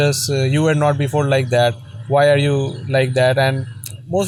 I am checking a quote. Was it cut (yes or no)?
no